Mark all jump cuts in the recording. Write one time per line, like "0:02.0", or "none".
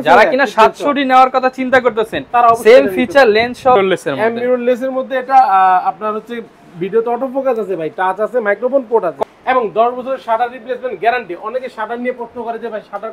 0:03.8
0:09.2